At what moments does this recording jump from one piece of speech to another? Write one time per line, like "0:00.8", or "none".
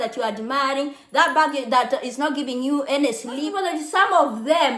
0:03.5